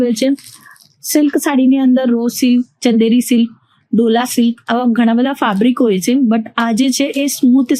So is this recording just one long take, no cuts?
yes; 0 cuts

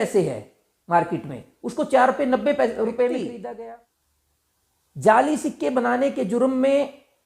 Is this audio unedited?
no; 1 cut; at 3.6 s

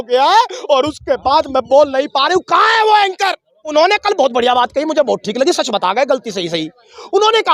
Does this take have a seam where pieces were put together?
yes; 1 cut; at 3.5 s

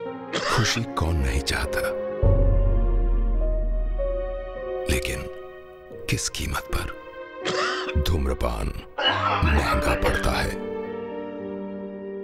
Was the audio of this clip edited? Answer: no; 0 cuts

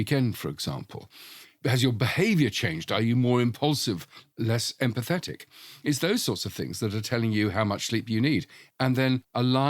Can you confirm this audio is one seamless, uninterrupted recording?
no; 2 cuts; at 1.5 s, 8.6 s

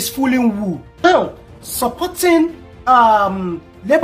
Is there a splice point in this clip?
yes; 1 cut; at 1.0 s

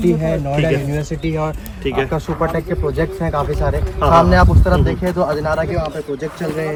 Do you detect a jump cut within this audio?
no; 0 cuts

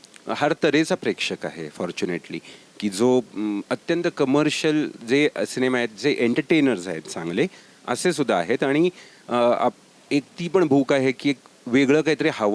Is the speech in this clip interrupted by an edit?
no; 0 cuts

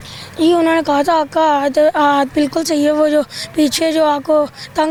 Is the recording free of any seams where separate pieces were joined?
yes; 0 cuts

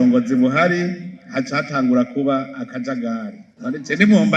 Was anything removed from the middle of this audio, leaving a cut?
yes; 1 cut; at 3.5 s

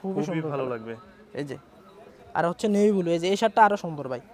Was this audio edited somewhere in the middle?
no; 0 cuts

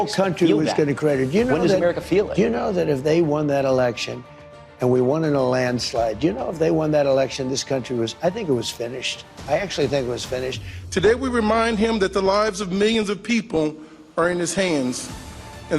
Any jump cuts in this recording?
yes; 1 cut; at 10.8 s

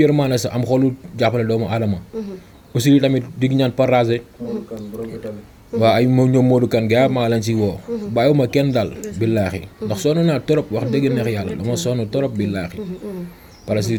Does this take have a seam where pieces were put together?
no; 0 cuts

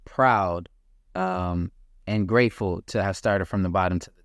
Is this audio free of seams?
yes; 0 cuts

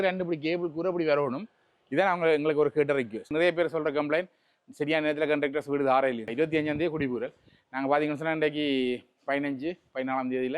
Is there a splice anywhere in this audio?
yes; 2 cuts; at 3.3 s, 6.3 s

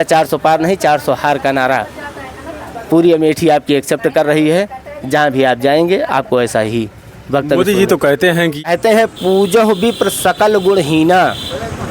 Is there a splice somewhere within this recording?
yes; 1 cut; at 8.6 s

